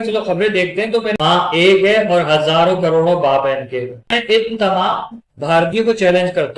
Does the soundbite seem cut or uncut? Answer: cut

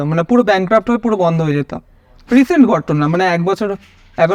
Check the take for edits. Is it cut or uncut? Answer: uncut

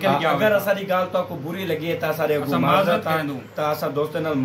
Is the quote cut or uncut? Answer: uncut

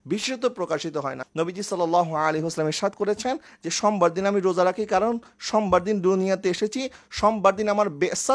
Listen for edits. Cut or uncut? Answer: cut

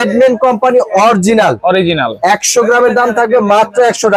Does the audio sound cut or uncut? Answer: uncut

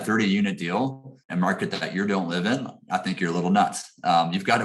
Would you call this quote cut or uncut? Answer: cut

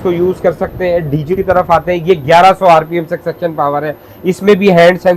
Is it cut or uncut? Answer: cut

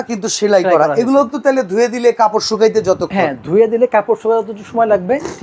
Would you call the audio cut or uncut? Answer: uncut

